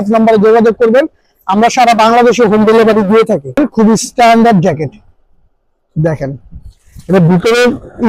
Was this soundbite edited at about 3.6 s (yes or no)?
yes